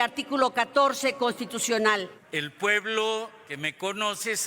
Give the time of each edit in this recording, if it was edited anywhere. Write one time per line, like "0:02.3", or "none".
0:02.2
0:03.4